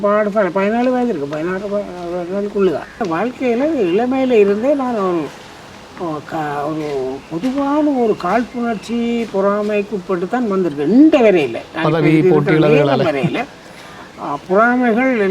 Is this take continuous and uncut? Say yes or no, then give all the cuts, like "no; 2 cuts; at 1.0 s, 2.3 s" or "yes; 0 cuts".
no; 1 cut; at 3.0 s